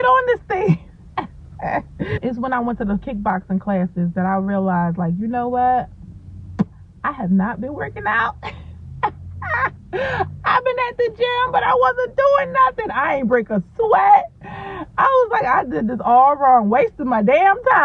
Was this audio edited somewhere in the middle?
yes; 1 cut; at 2.2 s

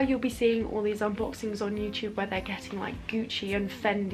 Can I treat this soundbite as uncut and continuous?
yes; 0 cuts

